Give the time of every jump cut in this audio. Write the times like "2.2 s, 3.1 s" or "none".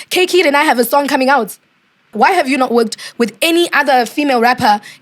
2.1 s